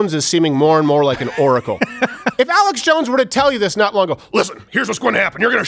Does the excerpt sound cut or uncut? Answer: uncut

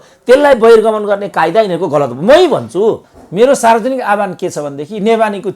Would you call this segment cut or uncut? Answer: cut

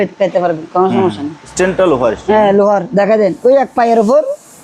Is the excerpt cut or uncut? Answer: cut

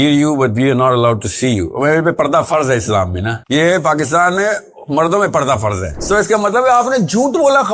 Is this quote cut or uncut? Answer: cut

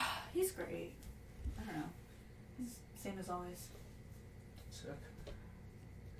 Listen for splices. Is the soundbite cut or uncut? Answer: uncut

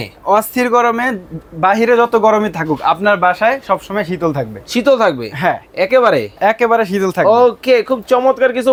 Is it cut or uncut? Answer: uncut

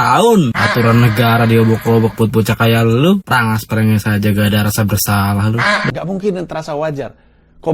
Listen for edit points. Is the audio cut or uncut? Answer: cut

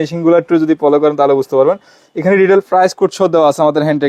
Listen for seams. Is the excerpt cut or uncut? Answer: uncut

